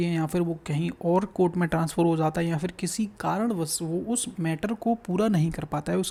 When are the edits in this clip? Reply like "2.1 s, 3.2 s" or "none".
none